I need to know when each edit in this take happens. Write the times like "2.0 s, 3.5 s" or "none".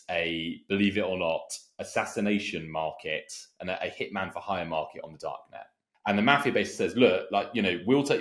5.8 s